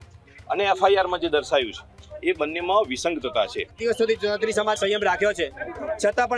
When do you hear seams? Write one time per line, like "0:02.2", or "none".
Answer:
0:03.6